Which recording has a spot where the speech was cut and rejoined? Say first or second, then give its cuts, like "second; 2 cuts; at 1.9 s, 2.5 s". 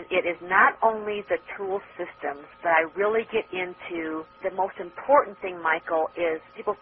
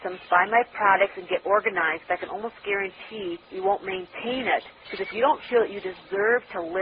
first; 1 cut; at 1.9 s